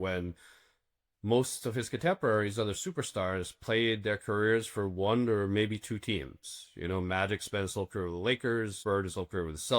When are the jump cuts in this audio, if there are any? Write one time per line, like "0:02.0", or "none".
0:08.7